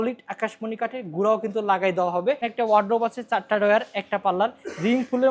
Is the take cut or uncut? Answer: cut